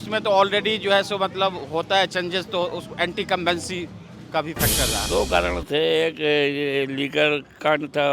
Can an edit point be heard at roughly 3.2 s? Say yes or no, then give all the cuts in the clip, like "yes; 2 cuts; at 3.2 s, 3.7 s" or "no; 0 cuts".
no; 1 cut; at 5.0 s